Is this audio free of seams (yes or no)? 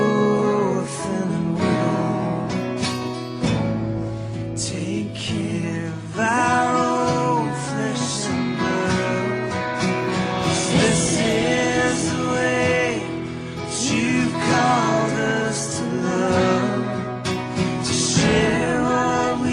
no